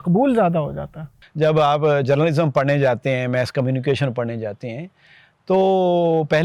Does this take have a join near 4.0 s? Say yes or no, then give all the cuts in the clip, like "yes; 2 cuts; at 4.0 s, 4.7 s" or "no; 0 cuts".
no; 1 cut; at 1.1 s